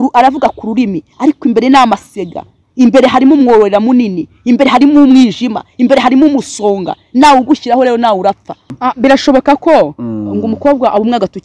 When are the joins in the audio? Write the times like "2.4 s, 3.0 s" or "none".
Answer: 8.7 s